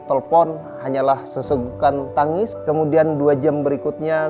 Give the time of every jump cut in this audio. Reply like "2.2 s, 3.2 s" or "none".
2.6 s